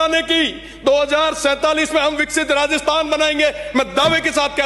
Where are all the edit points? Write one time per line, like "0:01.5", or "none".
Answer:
none